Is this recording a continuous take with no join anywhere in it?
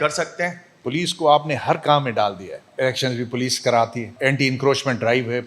no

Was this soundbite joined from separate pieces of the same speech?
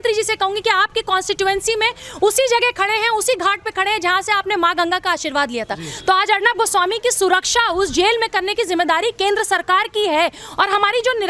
no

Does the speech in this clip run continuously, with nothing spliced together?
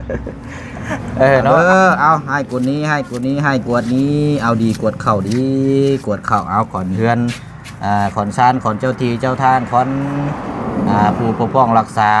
no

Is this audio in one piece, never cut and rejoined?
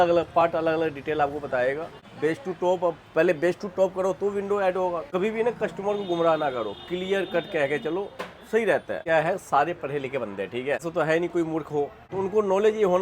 no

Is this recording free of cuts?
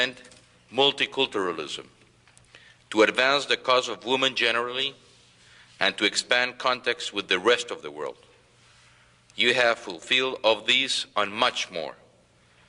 yes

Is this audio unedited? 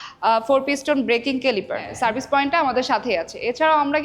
no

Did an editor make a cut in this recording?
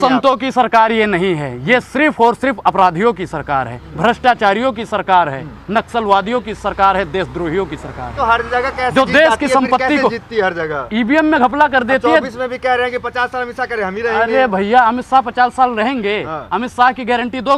no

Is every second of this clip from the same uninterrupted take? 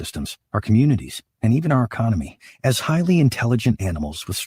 yes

